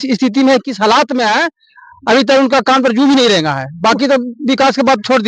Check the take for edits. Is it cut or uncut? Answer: uncut